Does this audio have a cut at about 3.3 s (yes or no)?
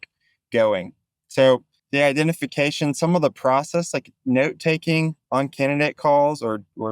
no